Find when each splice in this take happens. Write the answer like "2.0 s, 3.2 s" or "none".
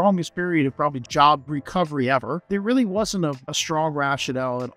1.0 s, 2.4 s, 3.5 s